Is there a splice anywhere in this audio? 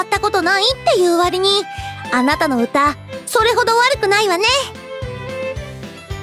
yes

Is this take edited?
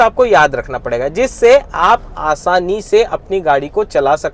no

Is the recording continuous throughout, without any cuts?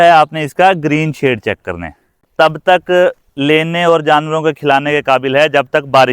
no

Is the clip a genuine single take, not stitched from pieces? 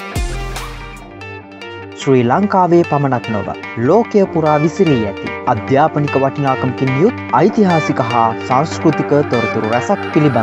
no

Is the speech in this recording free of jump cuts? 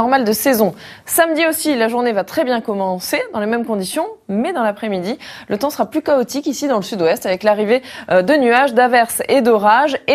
no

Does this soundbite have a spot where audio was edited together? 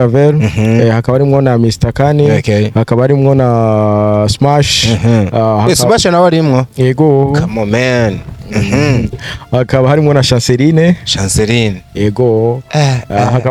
no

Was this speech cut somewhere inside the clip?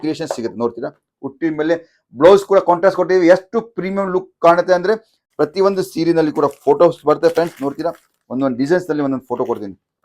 yes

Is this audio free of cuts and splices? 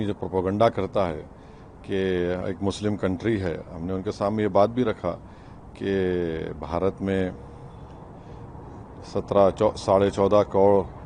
yes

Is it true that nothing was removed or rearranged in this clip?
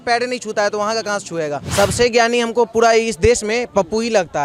no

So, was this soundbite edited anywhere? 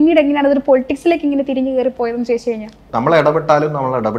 yes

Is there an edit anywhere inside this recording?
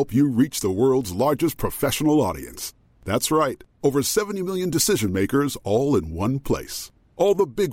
no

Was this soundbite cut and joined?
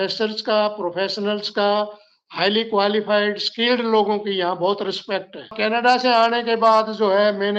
yes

